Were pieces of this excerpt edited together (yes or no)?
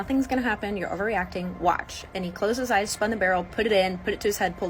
no